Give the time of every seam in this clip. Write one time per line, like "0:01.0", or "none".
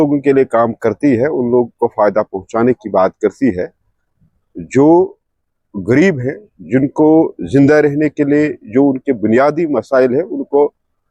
none